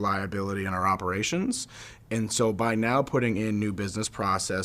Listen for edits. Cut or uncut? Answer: uncut